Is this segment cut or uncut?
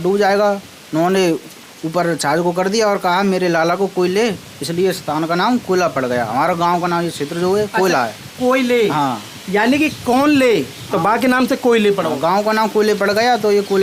uncut